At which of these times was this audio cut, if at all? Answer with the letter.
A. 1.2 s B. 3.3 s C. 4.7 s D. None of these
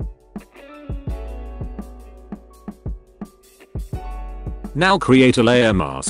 C